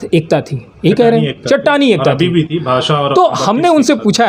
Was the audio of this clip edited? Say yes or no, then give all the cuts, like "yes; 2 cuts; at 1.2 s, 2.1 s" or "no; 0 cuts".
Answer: no; 0 cuts